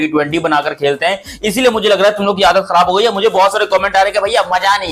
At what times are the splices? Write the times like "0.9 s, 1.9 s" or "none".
none